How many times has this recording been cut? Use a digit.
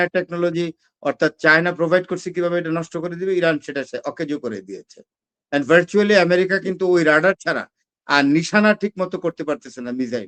0